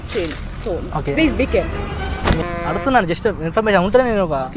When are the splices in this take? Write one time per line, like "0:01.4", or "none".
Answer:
0:02.4